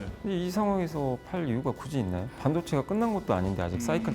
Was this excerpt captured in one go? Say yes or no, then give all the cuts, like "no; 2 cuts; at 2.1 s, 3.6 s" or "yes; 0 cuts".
no; 1 cut; at 2.4 s